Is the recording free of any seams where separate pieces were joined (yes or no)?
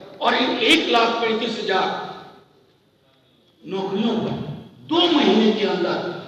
yes